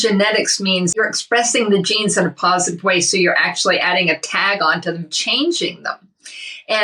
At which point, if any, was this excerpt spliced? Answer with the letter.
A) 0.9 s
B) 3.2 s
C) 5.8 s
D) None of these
A